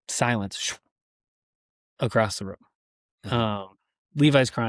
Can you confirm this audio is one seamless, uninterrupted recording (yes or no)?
yes